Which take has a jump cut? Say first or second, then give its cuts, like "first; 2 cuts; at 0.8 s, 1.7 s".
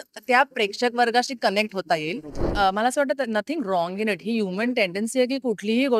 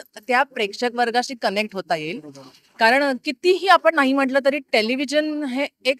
first; 1 cut; at 2.4 s